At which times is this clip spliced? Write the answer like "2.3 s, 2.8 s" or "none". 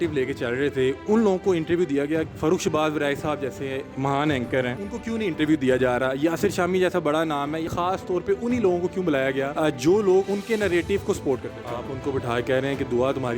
2.3 s, 3.9 s, 4.8 s, 7.7 s, 9.5 s, 10.3 s, 11.6 s